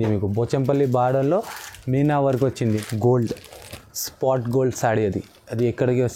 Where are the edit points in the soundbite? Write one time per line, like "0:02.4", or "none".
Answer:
0:02.6